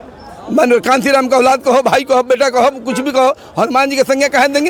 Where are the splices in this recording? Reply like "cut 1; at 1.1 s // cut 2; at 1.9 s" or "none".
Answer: none